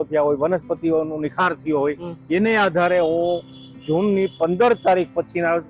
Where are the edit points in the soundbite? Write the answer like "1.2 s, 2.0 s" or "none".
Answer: none